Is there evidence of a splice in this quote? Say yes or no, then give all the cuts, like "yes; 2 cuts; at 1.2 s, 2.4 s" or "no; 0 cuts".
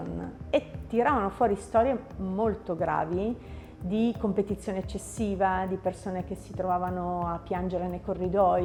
no; 0 cuts